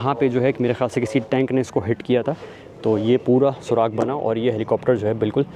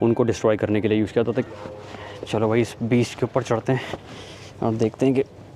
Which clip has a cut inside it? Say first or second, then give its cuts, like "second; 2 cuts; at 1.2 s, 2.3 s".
second; 1 cut; at 1.5 s